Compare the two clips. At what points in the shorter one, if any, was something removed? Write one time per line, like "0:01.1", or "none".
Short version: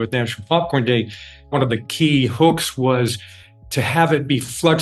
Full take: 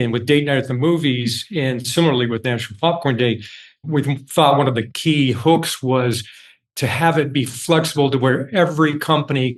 0:01.5